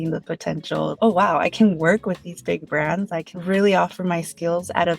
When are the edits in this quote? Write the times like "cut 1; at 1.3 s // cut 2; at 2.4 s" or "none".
cut 1; at 0.9 s // cut 2; at 3.3 s